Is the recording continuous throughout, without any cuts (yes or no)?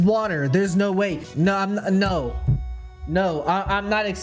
no